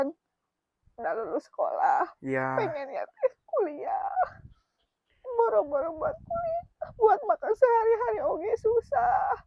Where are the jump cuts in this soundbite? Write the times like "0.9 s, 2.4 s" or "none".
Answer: none